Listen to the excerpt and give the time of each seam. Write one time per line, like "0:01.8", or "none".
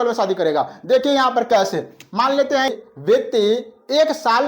0:02.7